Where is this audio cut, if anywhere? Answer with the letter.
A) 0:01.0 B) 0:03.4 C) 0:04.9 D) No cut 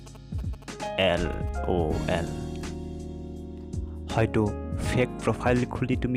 D